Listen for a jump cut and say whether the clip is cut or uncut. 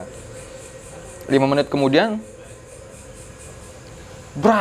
uncut